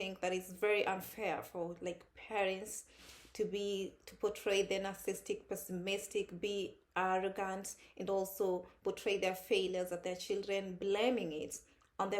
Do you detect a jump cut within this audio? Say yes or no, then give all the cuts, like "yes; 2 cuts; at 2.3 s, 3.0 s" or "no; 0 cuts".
no; 0 cuts